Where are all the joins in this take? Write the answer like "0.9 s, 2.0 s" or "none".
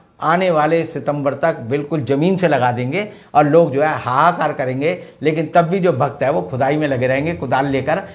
none

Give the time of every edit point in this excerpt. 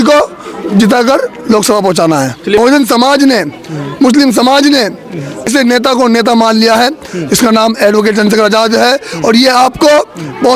2.6 s, 5.5 s

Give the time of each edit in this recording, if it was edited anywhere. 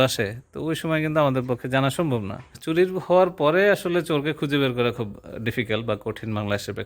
2.6 s

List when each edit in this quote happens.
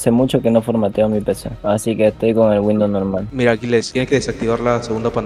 3.2 s

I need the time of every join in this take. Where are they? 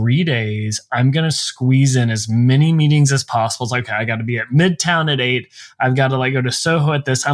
none

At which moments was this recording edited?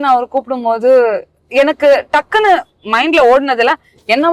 none

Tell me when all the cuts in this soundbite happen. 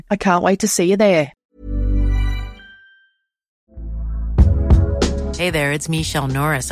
1.5 s, 3.5 s

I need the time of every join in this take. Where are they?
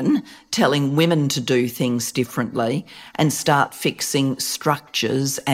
none

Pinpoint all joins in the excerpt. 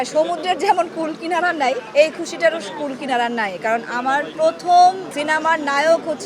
1.8 s, 4.3 s, 5.1 s

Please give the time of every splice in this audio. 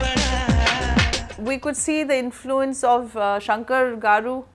1.4 s

